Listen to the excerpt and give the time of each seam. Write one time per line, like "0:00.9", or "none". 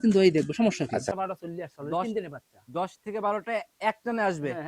0:01.1